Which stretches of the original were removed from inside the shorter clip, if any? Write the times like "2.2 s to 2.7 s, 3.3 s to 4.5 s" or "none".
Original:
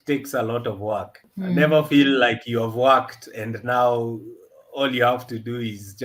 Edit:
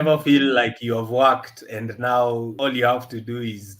4.2 s to 4.7 s